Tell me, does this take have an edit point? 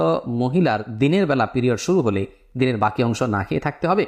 no; 0 cuts

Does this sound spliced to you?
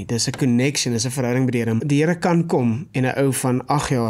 yes; 1 cut; at 1.8 s

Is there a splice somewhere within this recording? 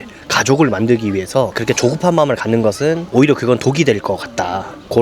yes; 2 cuts; at 1.6 s, 3.0 s

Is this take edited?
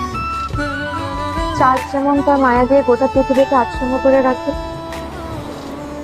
yes; 1 cut; at 1.1 s

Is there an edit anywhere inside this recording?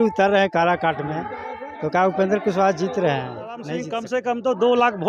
yes; 1 cut; at 3.9 s

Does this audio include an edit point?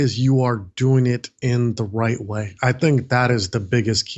no; 0 cuts

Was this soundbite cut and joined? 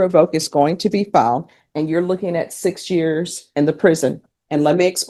no; 0 cuts

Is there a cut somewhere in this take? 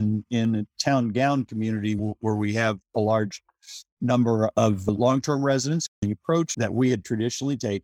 yes; 1 cut; at 6.0 s

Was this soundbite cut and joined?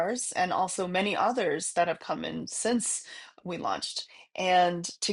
no; 0 cuts

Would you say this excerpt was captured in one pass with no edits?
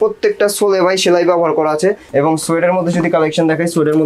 no; 1 cut; at 2.0 s

